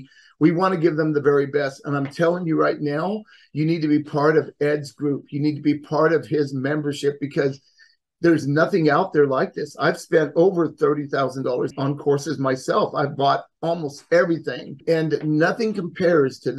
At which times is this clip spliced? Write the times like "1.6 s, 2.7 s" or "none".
11.7 s, 14.8 s